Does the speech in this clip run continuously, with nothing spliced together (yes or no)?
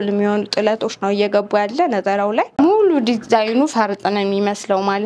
no